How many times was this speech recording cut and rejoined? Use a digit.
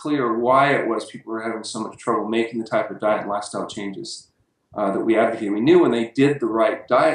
1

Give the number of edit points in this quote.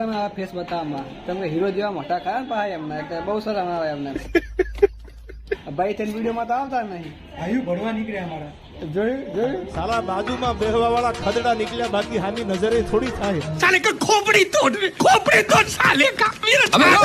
2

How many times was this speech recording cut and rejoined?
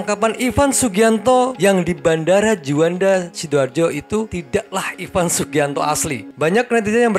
1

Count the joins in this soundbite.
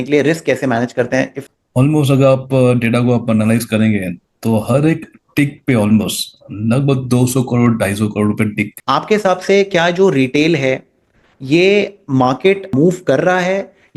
3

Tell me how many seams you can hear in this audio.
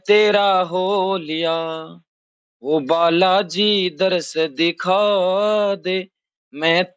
0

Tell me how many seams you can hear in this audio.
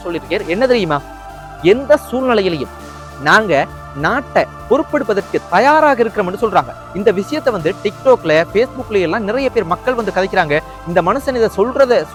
0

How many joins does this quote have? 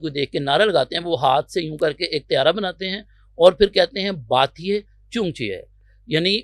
0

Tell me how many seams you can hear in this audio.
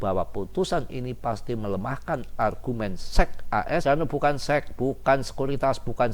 1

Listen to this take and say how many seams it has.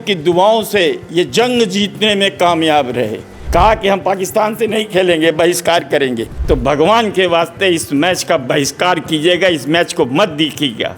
2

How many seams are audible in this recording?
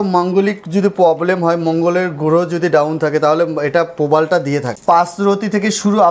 1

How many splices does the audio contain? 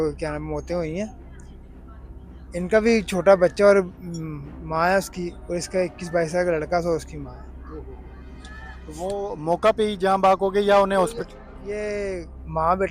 0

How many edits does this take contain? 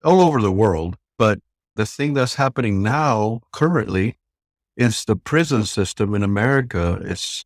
1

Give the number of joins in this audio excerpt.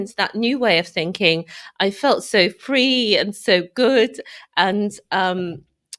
0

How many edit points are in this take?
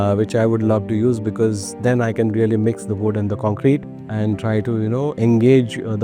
1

